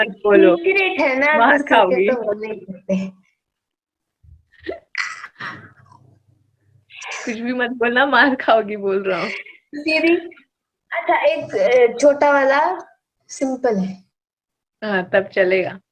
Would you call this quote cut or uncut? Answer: uncut